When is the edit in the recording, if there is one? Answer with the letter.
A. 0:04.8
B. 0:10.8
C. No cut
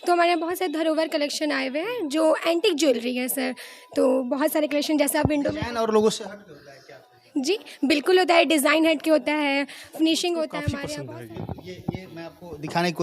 B